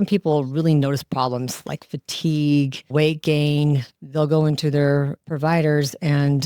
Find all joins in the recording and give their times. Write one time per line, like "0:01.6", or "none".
0:02.8
0:03.9